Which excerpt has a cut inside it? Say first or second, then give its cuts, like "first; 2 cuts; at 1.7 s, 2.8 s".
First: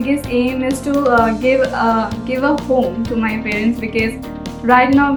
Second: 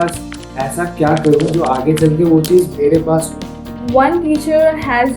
second; 1 cut; at 3.8 s